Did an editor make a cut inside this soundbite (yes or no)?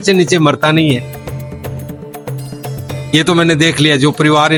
no